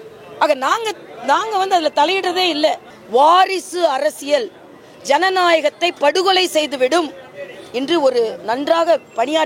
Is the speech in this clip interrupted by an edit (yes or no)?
yes